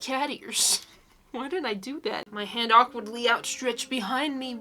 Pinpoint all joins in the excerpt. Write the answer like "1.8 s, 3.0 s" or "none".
2.3 s